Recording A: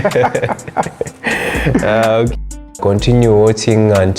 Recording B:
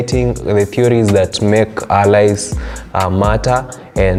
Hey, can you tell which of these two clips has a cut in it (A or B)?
A